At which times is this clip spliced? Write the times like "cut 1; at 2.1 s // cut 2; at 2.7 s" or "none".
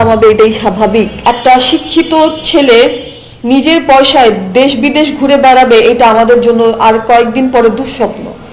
cut 1; at 1.1 s